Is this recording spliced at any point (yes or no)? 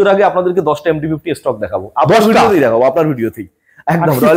no